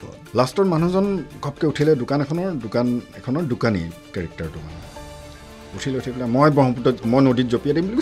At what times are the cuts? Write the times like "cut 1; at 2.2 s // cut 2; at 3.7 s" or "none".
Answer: none

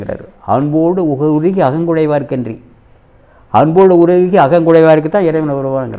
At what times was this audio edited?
none

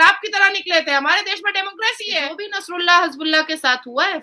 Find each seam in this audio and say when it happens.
cut 1; at 2.3 s

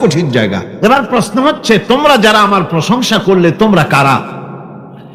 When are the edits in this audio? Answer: none

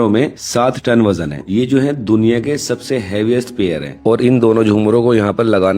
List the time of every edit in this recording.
cut 1; at 1.4 s // cut 2; at 3.9 s

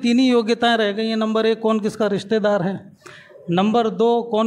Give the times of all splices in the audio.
none

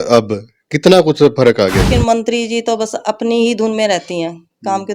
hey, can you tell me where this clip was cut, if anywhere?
cut 1; at 1.9 s

